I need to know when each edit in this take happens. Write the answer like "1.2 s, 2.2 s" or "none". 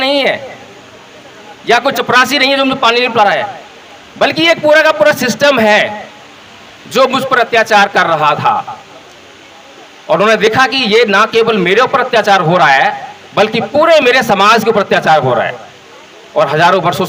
none